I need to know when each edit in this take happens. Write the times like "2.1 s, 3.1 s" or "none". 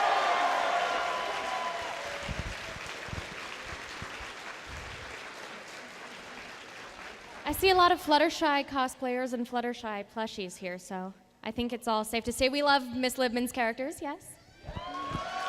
11.1 s